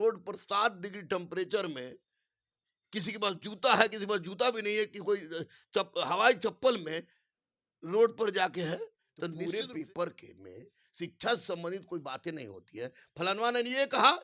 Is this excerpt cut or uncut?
cut